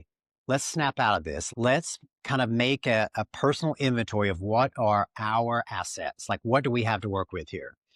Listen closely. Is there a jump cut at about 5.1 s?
no; 1 cut; at 1.4 s

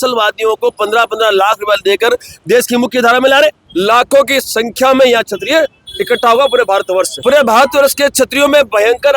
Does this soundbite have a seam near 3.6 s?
yes; 2 cuts; at 3.6 s, 7.1 s

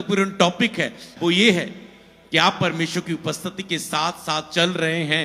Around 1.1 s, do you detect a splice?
yes; 1 cut; at 1.1 s

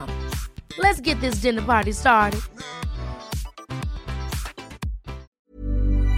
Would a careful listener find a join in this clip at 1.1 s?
no; 1 cut; at 5.3 s

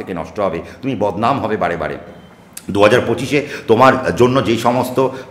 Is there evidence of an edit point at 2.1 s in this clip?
no; 0 cuts

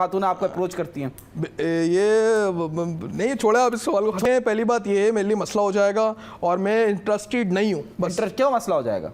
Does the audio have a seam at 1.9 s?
no; 1 cut; at 4.2 s

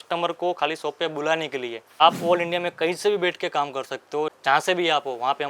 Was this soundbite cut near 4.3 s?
yes; 2 cuts; at 2.0 s, 4.3 s

